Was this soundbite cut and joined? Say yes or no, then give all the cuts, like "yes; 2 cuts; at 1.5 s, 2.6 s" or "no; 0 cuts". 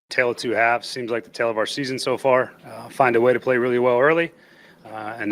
yes; 1 cut; at 0.9 s